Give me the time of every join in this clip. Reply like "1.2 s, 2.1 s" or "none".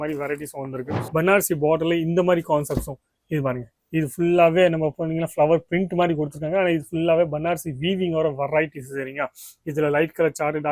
1.0 s